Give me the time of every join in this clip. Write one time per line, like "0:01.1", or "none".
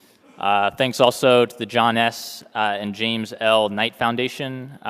0:01.5